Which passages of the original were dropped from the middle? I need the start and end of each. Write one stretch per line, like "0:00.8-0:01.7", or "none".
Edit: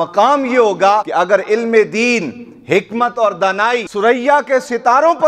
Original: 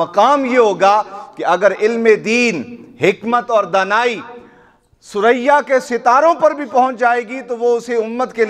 0:01.1-0:01.4
0:04.2-0:05.1

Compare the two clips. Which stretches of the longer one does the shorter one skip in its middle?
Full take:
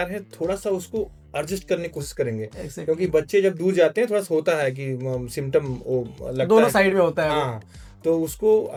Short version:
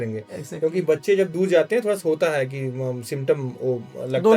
none

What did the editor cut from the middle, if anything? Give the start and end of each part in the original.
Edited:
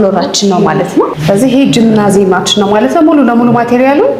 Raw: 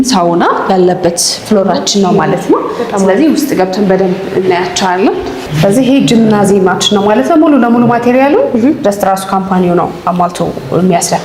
0:02.7-0:05.5

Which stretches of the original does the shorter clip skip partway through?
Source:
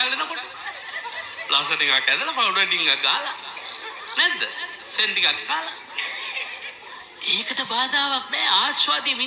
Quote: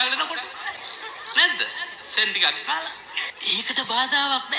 0:00.9-0:03.7
0:06.1-0:07.1

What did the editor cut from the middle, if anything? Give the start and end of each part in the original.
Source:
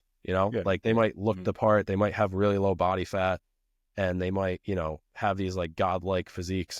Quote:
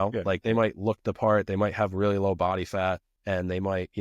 0:03.5-0:03.8

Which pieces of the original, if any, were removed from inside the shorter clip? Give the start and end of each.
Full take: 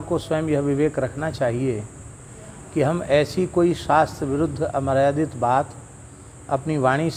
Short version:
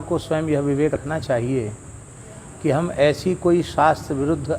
0:01.0-0:01.1

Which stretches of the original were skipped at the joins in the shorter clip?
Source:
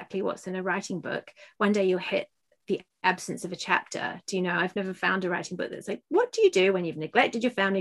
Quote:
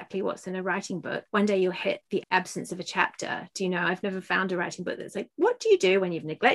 0:01.2-0:01.5
0:02.4-0:02.9

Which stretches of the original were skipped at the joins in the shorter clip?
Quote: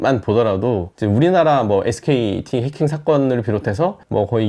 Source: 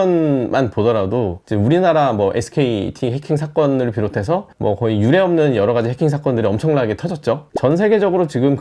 none

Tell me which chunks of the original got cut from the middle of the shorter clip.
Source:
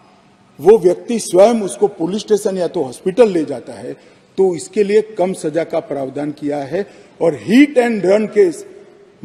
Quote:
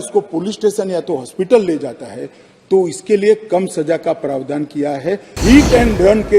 0:07.0-0:07.4

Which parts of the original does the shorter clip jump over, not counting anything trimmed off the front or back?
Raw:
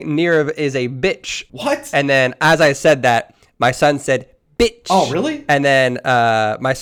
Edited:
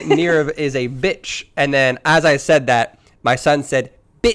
0:01.5-0:01.8

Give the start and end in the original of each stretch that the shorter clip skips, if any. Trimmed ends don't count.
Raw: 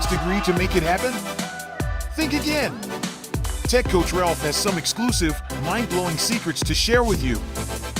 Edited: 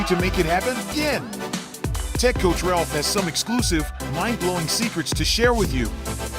0:01.3-0:02.4

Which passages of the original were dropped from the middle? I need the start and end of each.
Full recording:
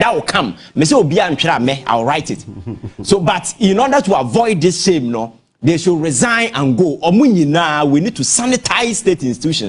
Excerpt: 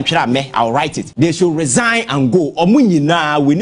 0:02.3-0:05.5

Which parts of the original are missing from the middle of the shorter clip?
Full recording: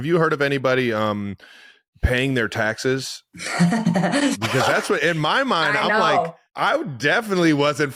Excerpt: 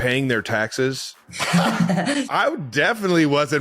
0:04.3-0:06.5

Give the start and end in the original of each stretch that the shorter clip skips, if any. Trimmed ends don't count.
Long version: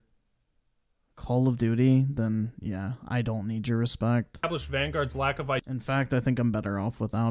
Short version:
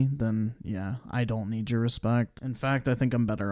0:04.4-0:05.6

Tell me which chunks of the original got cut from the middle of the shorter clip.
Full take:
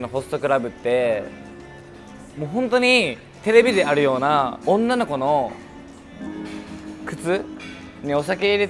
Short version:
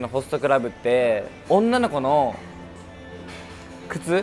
0:01.4-0:04.6

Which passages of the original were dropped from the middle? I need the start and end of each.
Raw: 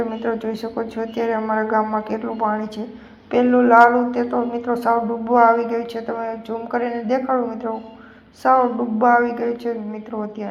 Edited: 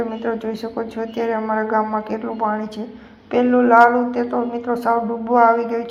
none

